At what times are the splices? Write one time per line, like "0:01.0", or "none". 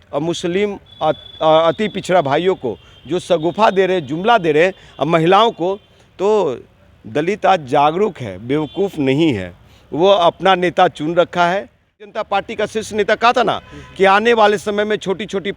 0:12.1